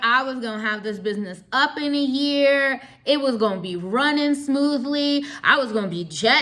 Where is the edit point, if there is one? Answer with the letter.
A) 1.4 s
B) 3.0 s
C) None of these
C